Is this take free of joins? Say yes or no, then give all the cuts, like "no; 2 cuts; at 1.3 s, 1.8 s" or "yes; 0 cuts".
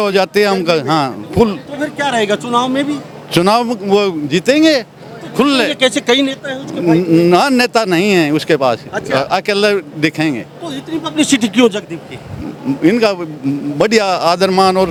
yes; 0 cuts